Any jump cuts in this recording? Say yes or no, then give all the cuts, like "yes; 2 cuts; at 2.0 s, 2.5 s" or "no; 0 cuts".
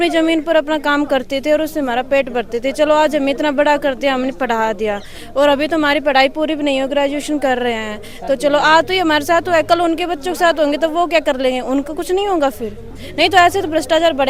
no; 0 cuts